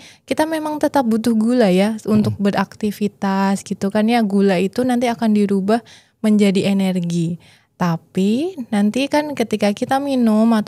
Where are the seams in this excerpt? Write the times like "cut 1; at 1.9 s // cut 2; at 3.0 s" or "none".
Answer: none